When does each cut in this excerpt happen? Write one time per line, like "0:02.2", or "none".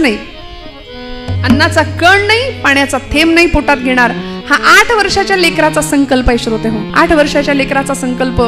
0:06.9